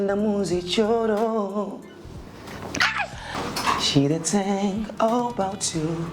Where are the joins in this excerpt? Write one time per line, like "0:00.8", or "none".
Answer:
0:03.3